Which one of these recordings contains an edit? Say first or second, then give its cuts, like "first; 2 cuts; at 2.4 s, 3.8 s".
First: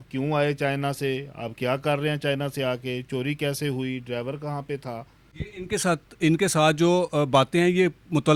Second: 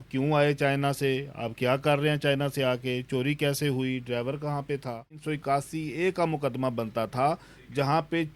second; 1 cut; at 5.2 s